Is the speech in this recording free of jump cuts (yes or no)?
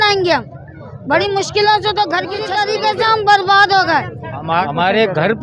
no